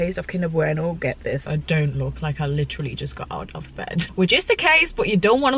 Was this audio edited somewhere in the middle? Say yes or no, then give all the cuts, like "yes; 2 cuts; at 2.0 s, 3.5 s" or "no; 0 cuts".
yes; 2 cuts; at 1.5 s, 4.1 s